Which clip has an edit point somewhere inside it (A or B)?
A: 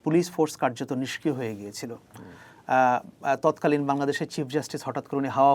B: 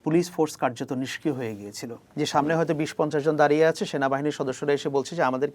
B